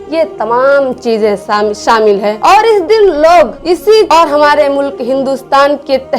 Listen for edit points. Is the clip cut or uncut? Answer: cut